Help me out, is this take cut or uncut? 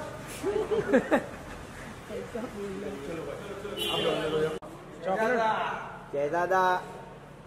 cut